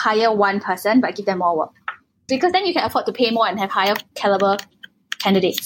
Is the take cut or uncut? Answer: cut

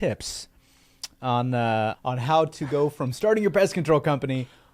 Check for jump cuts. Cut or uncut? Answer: cut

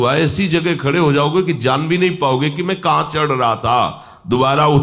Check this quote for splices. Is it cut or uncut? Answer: uncut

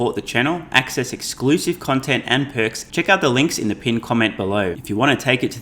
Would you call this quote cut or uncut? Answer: cut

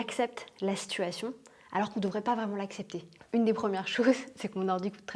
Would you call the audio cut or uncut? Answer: cut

